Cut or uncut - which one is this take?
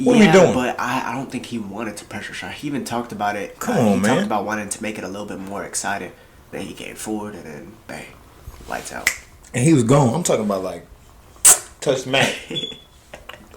cut